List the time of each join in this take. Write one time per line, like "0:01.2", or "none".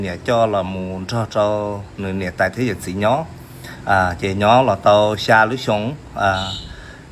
none